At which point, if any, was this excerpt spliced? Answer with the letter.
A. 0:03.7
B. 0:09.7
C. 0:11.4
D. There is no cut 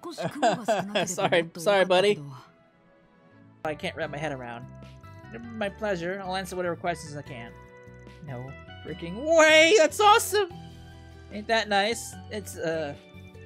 A